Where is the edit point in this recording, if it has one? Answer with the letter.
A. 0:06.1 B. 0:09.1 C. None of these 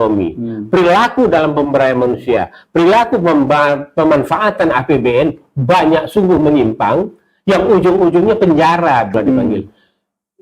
B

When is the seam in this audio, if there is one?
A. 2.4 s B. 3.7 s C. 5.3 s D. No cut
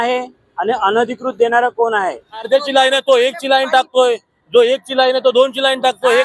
A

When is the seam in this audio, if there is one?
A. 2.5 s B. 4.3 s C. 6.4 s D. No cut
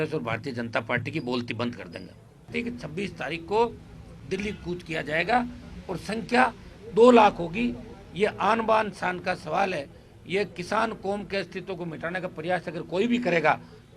A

